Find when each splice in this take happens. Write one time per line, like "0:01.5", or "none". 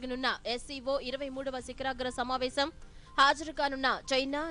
none